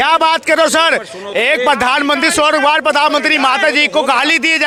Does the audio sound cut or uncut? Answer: uncut